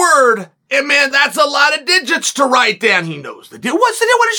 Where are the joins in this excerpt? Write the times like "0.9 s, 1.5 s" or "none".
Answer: none